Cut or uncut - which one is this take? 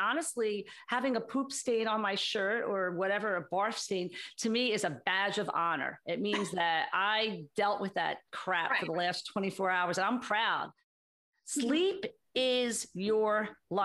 cut